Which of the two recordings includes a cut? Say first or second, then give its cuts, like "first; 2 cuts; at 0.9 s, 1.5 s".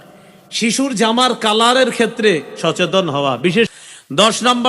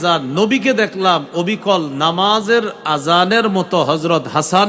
first; 1 cut; at 3.7 s